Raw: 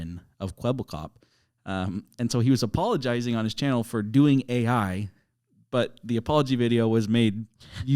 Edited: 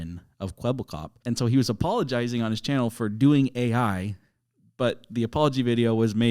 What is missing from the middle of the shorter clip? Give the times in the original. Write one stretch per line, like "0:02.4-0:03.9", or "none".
0:01.2-0:02.1